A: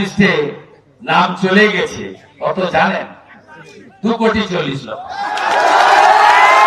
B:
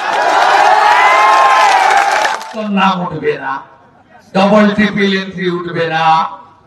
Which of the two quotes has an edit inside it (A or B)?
B